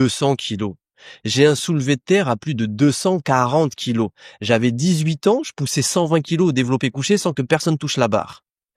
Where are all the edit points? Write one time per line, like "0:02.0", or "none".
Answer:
none